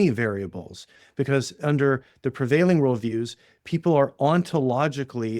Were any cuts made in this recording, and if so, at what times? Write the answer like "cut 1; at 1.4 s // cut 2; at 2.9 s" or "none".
none